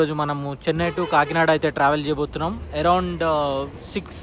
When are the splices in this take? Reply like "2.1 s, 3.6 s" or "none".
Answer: none